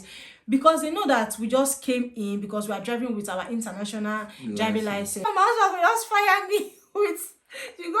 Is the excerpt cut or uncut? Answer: cut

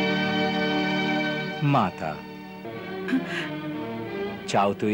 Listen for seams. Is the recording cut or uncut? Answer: cut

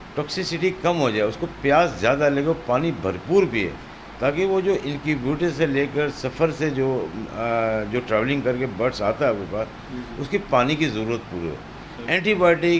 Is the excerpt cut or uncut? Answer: uncut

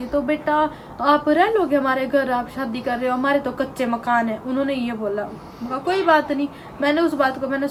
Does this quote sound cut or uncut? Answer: uncut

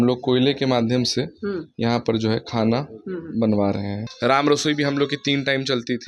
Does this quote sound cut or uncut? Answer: cut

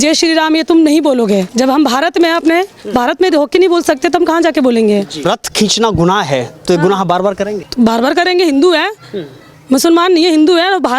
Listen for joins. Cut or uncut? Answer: cut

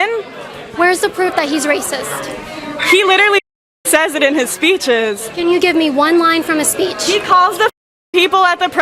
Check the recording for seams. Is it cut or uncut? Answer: uncut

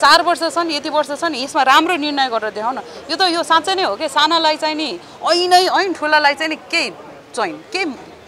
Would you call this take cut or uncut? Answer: uncut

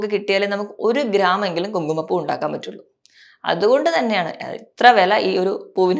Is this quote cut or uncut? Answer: uncut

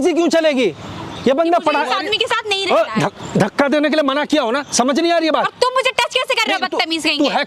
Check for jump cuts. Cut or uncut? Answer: uncut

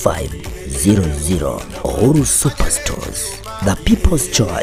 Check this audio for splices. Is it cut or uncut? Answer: uncut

